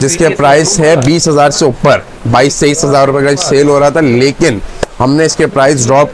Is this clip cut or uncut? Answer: uncut